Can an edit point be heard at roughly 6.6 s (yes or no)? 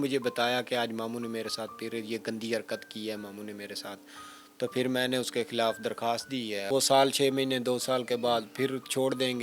yes